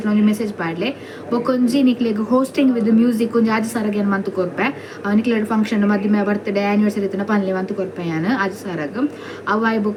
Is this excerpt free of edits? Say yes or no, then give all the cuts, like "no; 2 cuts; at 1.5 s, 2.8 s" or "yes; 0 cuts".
yes; 0 cuts